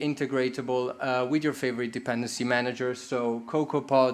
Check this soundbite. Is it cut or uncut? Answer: uncut